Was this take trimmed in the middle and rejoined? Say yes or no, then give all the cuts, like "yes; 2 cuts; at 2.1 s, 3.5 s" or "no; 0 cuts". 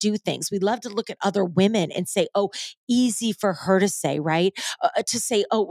no; 0 cuts